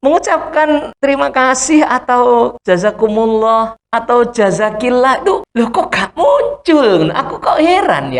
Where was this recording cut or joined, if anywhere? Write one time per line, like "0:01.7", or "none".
0:00.9
0:02.6
0:03.8
0:05.5

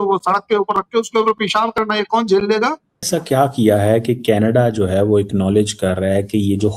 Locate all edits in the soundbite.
0:02.9

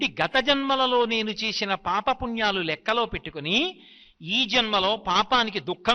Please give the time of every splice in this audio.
none

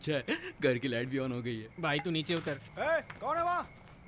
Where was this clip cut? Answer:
0:01.7
0:02.7

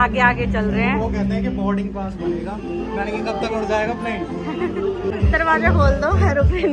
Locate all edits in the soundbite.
0:05.1

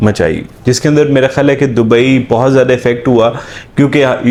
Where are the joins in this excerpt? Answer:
none

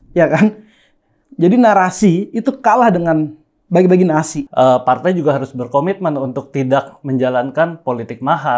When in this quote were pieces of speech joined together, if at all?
0:04.4

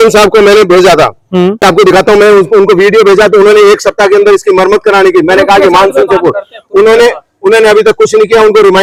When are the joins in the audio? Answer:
none

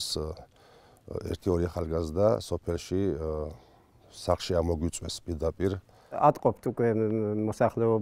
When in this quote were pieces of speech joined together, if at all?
0:06.2

